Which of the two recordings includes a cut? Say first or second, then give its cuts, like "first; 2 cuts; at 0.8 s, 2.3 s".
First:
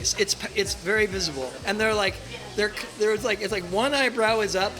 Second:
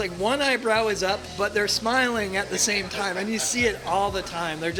first; 1 cut; at 1.6 s